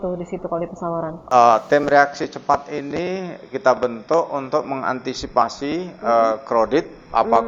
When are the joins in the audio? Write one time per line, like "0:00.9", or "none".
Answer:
0:01.2